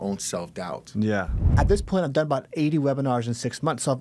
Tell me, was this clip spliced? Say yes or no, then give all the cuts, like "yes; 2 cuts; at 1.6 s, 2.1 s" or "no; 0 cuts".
yes; 1 cut; at 1.5 s